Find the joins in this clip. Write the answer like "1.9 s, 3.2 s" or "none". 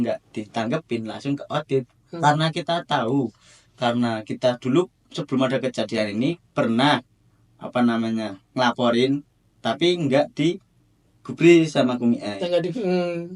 none